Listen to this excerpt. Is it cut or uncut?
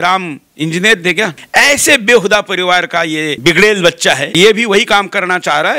cut